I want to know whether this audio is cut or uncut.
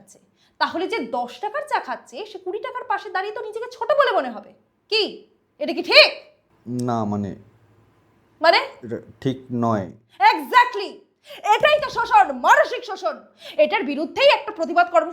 uncut